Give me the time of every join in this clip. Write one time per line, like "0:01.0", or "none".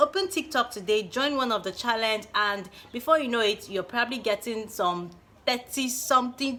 none

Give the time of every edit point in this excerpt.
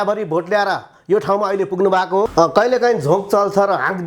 0:02.3

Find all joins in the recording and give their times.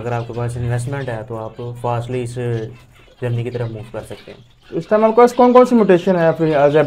none

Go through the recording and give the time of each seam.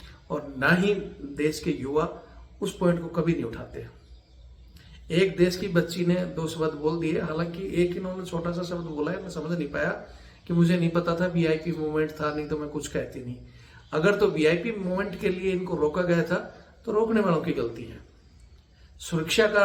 none

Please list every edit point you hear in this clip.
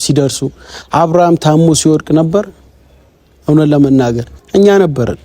0:04.3

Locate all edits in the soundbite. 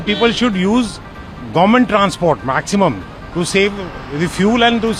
none

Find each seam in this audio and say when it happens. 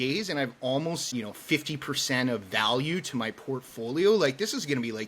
0:01.1

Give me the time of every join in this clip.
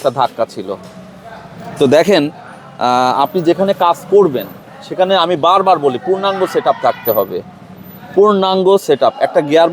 none

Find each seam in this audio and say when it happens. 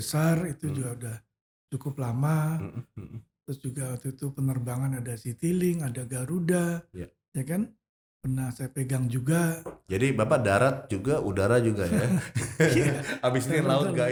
none

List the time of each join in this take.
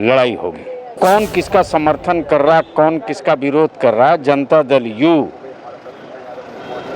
0:00.9

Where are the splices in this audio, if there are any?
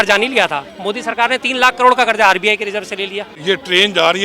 0:03.3

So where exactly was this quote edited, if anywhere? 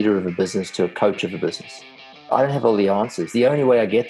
0:02.3

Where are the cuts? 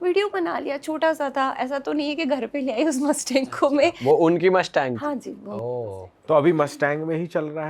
none

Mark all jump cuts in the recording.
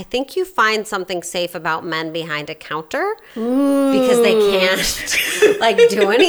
none

